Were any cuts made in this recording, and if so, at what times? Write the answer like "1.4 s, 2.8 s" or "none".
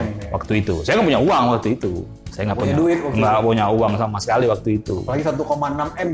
none